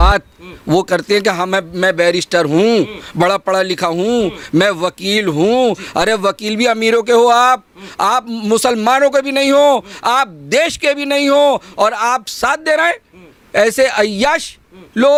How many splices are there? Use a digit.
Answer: 0